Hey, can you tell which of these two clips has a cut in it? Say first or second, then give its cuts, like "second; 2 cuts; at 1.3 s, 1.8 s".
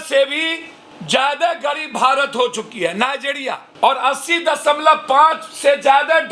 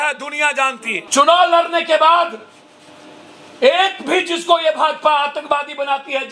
second; 1 cut; at 0.9 s